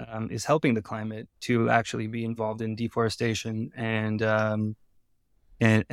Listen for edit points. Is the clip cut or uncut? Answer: uncut